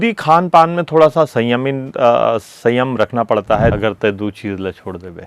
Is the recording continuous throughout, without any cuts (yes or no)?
no